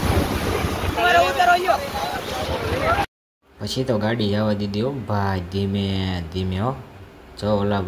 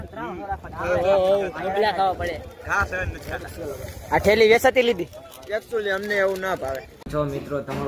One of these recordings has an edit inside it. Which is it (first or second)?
second